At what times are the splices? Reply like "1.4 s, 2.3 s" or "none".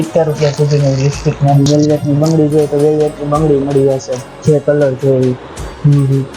1.7 s